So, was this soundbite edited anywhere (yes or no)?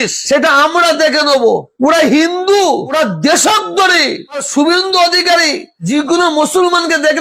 no